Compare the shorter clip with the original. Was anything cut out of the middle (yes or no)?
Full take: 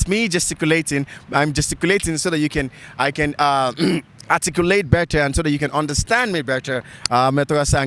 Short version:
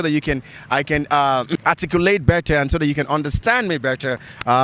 yes